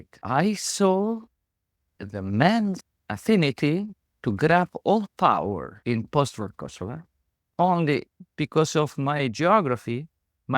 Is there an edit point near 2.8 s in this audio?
yes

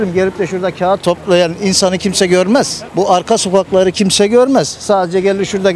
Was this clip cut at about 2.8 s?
no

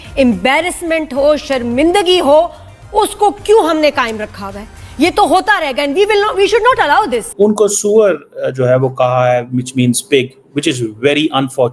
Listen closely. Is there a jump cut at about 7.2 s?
yes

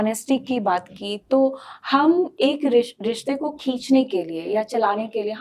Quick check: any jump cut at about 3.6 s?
no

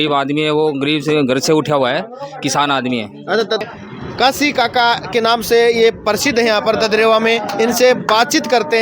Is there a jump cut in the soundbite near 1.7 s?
no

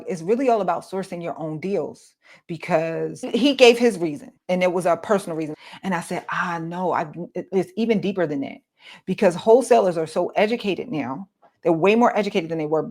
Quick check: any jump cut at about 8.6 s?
no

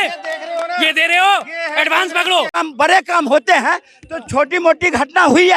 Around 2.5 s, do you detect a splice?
yes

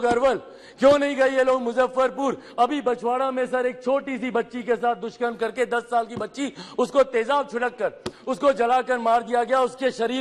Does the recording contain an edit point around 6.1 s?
no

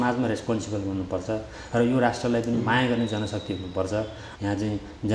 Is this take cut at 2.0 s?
no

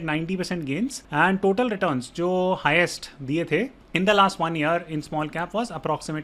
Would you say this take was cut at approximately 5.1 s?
no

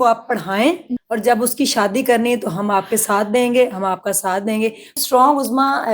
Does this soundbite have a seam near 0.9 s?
yes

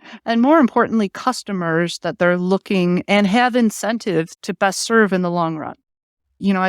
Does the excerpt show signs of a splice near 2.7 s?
no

